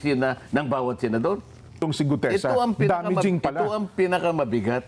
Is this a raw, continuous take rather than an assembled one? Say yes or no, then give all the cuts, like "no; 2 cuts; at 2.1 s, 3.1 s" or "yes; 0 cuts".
no; 1 cut; at 1.8 s